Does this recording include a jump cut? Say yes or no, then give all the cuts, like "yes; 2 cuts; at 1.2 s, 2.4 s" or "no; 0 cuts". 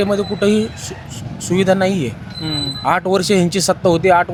no; 0 cuts